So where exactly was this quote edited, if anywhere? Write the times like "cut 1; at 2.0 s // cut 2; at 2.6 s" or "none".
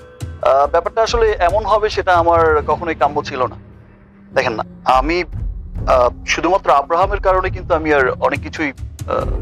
none